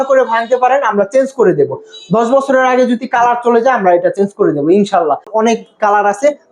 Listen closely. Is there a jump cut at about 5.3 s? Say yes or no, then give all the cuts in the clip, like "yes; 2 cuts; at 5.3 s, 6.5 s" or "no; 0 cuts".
yes; 1 cut; at 5.3 s